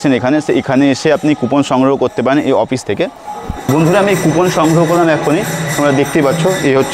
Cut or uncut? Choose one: cut